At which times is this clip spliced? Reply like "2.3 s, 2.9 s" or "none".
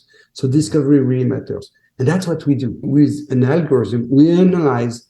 2.9 s